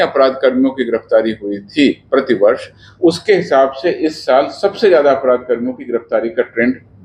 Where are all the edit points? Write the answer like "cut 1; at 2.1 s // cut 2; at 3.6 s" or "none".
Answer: none